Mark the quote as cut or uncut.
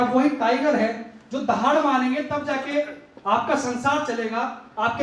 uncut